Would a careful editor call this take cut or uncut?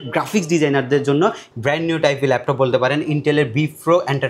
cut